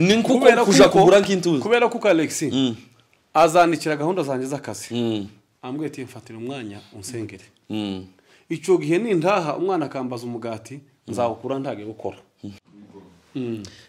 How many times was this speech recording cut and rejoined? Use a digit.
1